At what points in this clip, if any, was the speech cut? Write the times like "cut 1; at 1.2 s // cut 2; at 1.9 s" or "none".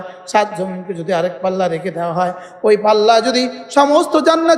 none